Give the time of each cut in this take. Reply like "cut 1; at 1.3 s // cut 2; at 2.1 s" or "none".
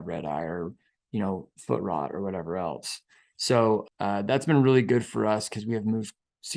cut 1; at 3.8 s